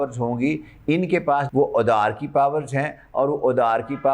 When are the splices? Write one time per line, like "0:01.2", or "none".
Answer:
0:01.5